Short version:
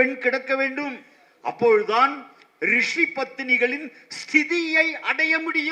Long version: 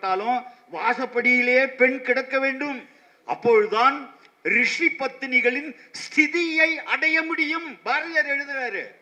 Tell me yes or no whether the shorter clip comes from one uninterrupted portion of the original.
yes